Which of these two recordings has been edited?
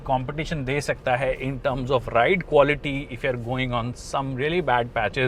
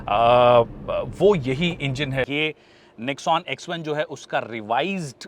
second; 1 cut; at 2.3 s

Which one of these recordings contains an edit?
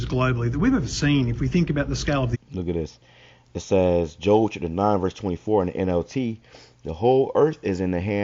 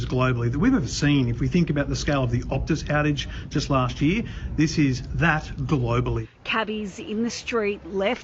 second; 1 cut; at 2.6 s

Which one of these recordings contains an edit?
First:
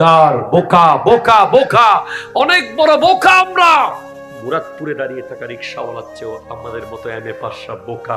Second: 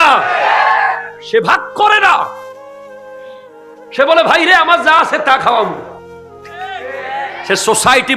second; 2 cuts; at 2.4 s, 3.6 s

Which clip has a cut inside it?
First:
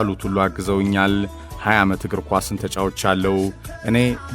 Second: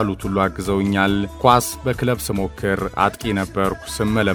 first; 1 cut; at 1.3 s

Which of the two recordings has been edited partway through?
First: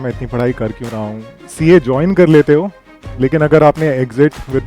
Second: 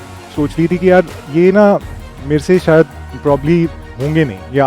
first; 1 cut; at 1.4 s

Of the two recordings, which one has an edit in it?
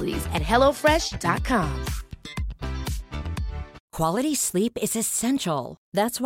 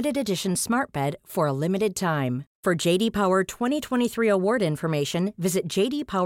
first; 1 cut; at 3.8 s

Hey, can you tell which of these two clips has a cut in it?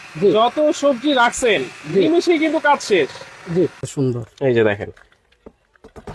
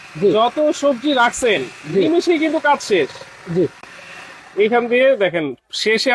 first; 1 cut; at 3.8 s

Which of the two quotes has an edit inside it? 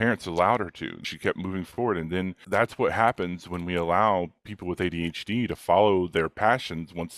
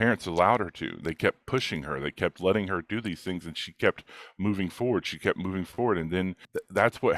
first; 2 cuts; at 1.1 s, 2.4 s

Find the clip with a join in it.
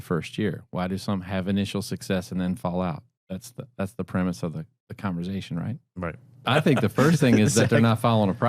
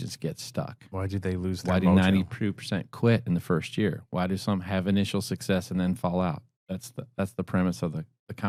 first; 1 cut; at 6.5 s

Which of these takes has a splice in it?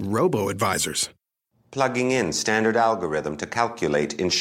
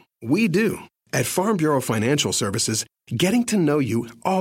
second; 1 cut; at 0.9 s

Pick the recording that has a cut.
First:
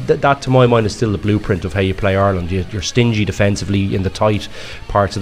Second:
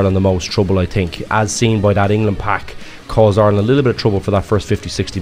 second; 2 cuts; at 1.2 s, 3.0 s

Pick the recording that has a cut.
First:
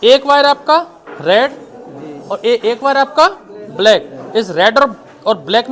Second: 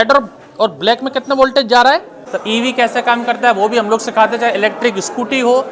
second; 1 cut; at 2.2 s

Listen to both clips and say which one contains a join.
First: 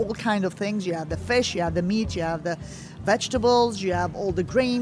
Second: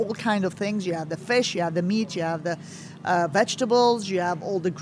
first; 1 cut; at 3.0 s

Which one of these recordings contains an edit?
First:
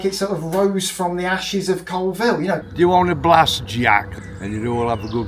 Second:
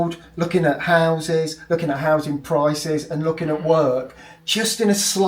first; 2 cuts; at 2.6 s, 4.1 s

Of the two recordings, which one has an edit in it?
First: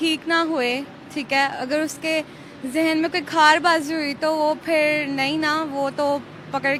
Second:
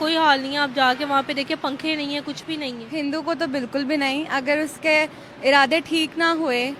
second; 1 cut; at 2.8 s

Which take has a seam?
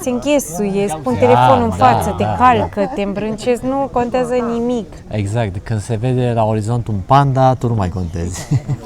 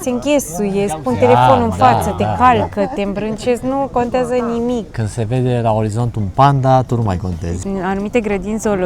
second; 2 cuts; at 5.0 s, 7.6 s

